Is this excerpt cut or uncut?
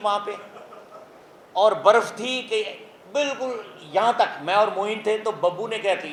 uncut